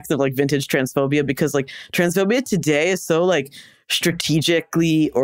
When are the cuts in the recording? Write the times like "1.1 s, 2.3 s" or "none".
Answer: none